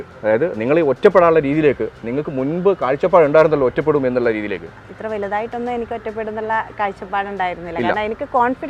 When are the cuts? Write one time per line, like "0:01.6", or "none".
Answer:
none